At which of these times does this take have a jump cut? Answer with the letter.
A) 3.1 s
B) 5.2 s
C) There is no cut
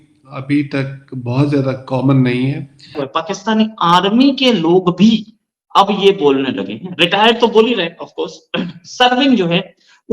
A